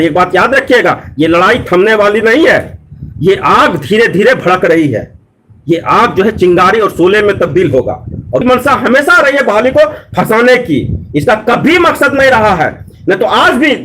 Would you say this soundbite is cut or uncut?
cut